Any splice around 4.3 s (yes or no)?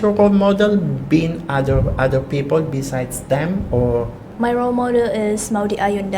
yes